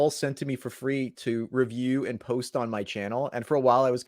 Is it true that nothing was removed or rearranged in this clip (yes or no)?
no